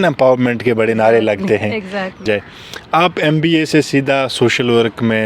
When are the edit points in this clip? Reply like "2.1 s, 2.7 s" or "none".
2.2 s

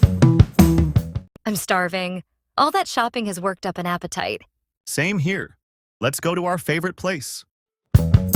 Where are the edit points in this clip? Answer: none

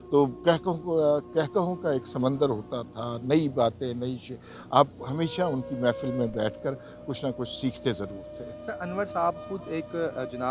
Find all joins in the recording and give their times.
none

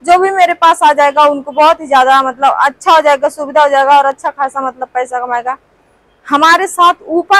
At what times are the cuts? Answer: none

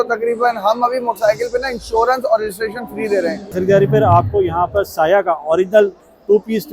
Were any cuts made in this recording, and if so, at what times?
3.5 s

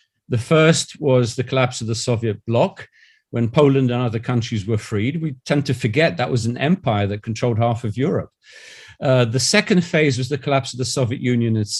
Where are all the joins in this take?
none

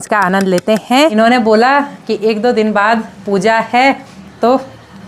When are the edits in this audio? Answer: 1.1 s

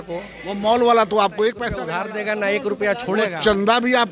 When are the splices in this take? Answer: 1.8 s

